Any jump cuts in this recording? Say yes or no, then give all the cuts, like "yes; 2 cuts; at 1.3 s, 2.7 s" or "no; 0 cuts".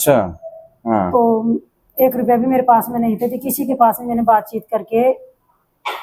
no; 0 cuts